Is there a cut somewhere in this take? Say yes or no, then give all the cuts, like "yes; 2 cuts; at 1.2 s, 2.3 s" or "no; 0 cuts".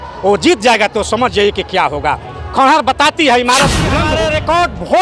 yes; 1 cut; at 4.0 s